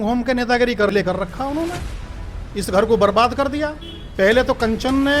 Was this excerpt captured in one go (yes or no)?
no